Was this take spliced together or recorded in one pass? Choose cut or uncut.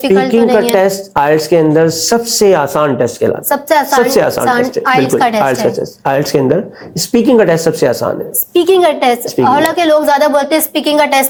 uncut